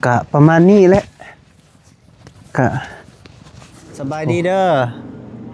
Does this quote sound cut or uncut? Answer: cut